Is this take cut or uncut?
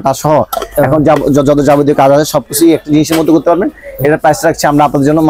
uncut